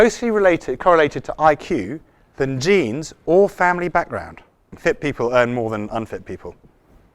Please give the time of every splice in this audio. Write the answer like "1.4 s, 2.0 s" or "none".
4.7 s